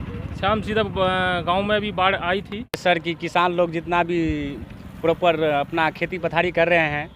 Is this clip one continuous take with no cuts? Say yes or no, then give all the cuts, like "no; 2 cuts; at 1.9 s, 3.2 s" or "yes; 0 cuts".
no; 1 cut; at 2.8 s